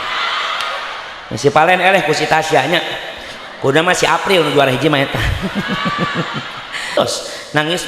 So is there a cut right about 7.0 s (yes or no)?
yes